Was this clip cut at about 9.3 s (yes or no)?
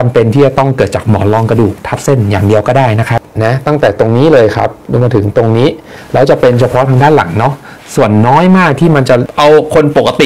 yes